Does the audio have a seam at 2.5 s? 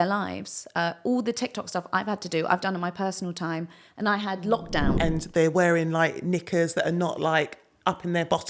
no; 1 cut; at 5.0 s

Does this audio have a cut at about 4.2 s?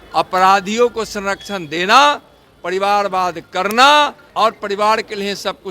yes; 1 cut; at 4.2 s

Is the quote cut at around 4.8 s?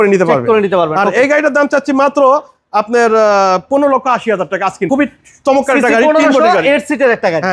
yes; 1 cut; at 4.8 s

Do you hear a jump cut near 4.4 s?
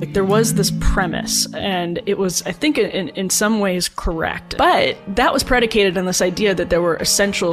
yes; 1 cut; at 4.4 s

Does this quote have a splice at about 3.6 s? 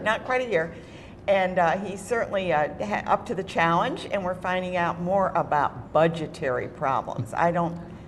yes; 1 cut; at 3.6 s

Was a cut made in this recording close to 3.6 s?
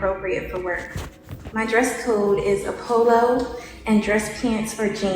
yes; 1 cut; at 3.6 s

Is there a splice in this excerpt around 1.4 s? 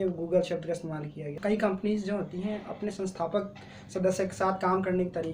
yes; 1 cut; at 1.4 s

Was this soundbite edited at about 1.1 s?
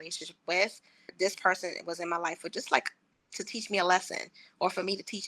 yes; 1 cut; at 1.1 s

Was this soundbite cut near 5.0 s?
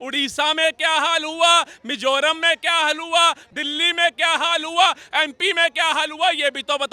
no; 1 cut; at 3.4 s

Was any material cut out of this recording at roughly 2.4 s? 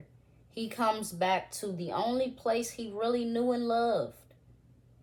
no; 0 cuts

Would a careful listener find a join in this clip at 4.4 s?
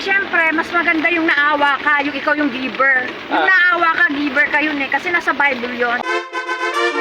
no; 1 cut; at 6.0 s

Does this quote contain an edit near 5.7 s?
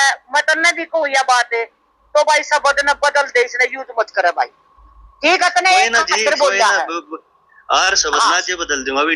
no; 0 cuts

